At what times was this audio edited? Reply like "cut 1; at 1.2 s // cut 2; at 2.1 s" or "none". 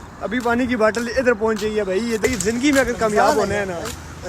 cut 1; at 2.2 s